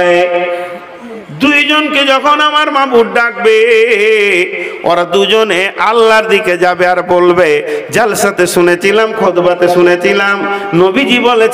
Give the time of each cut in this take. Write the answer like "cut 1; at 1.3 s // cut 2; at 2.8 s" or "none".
cut 1; at 4.5 s